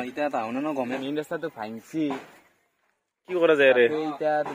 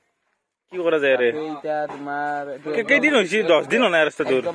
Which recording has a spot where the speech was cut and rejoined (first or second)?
first